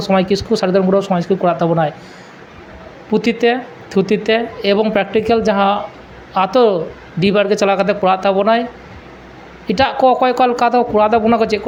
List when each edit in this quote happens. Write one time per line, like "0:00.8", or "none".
none